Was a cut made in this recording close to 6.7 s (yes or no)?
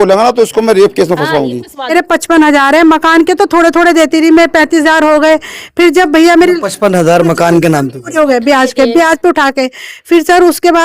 no